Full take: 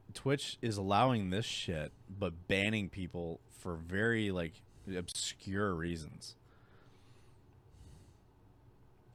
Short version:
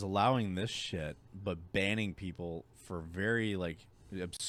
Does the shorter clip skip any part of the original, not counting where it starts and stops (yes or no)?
no